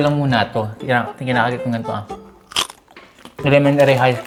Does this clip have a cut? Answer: no; 0 cuts

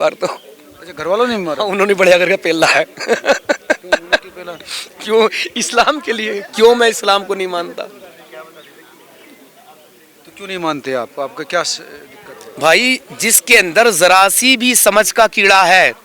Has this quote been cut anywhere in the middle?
no; 0 cuts

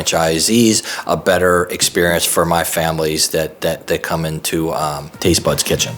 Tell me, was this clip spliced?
yes; 1 cut; at 5.1 s

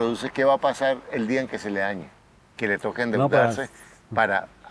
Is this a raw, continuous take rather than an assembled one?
yes; 0 cuts

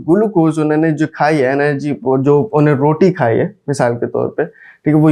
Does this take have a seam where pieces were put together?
no; 0 cuts

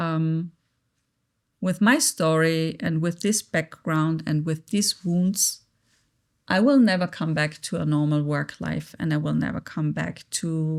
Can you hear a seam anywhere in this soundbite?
no; 0 cuts

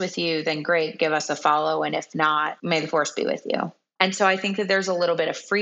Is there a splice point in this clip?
yes; 2 cuts; at 2.6 s, 3.8 s

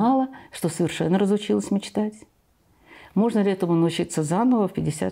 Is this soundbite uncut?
yes; 0 cuts

